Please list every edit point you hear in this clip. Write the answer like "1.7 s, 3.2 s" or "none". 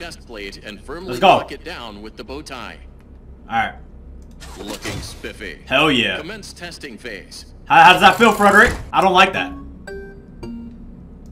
8.8 s